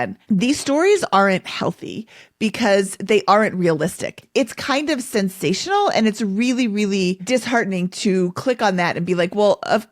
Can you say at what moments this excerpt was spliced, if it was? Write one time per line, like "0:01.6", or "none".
0:04.2
0:07.2